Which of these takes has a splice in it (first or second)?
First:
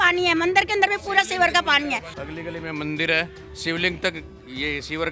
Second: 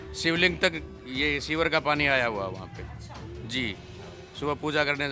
first